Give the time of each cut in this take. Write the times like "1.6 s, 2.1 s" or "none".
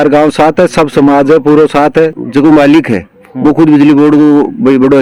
2.2 s